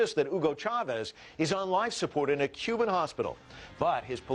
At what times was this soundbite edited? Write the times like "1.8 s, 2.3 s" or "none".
none